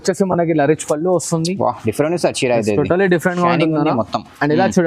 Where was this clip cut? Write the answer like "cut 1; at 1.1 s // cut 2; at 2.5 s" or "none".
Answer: none